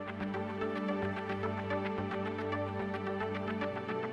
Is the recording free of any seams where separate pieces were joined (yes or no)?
yes